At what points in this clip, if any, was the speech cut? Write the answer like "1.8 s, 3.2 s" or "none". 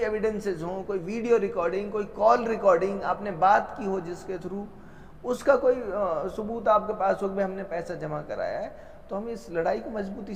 none